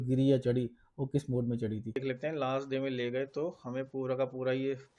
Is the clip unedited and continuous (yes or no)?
no